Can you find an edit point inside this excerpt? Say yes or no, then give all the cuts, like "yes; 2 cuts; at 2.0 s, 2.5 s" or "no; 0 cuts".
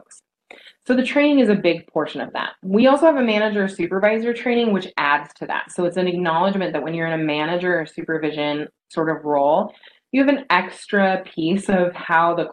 no; 0 cuts